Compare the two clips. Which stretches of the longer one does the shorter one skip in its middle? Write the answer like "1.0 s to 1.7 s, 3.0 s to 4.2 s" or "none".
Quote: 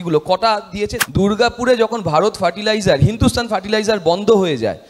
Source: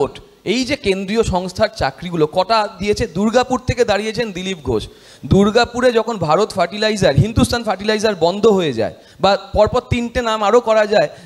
3.1 s to 5.1 s